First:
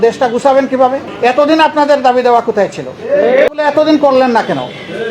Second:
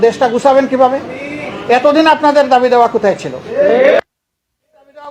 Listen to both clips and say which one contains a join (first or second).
first